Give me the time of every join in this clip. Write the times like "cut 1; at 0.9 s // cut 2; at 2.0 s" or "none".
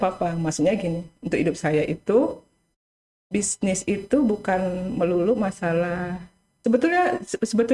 cut 1; at 6.5 s

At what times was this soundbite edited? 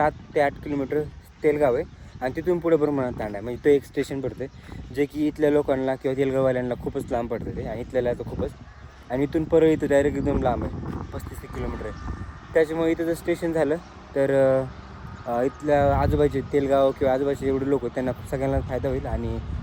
none

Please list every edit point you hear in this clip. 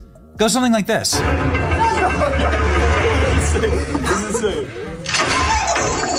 none

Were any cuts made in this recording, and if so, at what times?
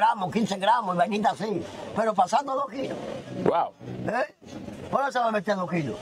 none

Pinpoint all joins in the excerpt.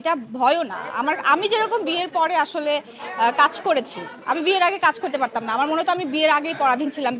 none

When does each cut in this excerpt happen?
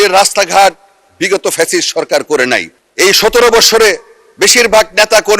cut 1; at 2.7 s

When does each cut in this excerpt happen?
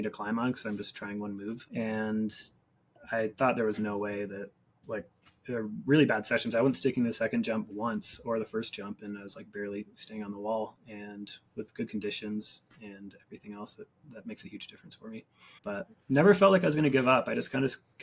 cut 1; at 1.6 s // cut 2; at 4.7 s // cut 3; at 14.0 s // cut 4; at 15.4 s

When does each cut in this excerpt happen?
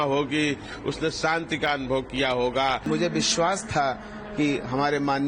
cut 1; at 2.9 s

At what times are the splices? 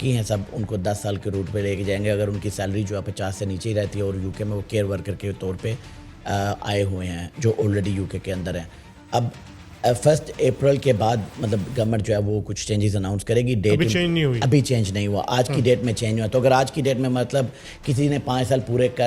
none

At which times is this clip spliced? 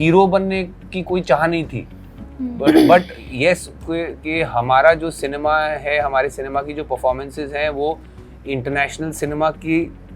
none

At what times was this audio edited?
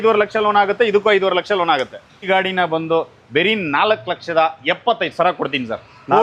cut 1; at 2.3 s

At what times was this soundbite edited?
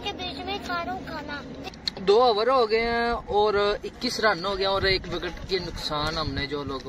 cut 1; at 1.6 s

